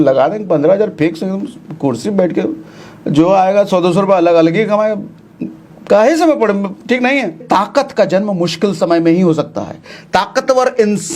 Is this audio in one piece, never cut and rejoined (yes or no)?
no